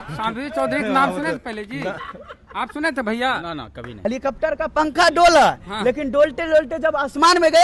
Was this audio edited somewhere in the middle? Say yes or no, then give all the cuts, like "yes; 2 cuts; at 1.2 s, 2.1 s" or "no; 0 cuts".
yes; 1 cut; at 4.0 s